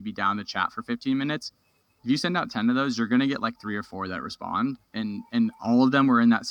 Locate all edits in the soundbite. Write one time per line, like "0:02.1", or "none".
none